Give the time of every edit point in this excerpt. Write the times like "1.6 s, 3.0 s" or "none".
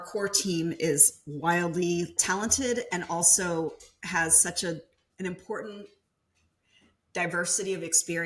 2.2 s, 5.0 s